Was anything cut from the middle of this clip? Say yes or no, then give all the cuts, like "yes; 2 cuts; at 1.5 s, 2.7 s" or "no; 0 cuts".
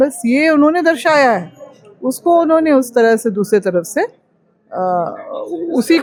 no; 0 cuts